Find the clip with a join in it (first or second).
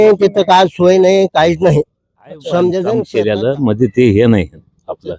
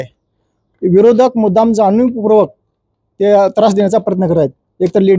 first